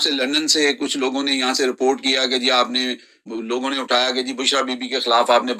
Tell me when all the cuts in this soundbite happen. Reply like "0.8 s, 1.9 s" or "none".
3.2 s